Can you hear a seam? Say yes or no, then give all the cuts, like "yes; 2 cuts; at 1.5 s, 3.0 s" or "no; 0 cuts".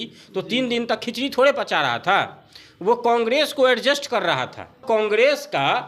yes; 1 cut; at 4.8 s